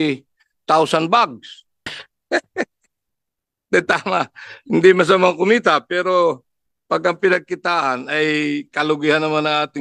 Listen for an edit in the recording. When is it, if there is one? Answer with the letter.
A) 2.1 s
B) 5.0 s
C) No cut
A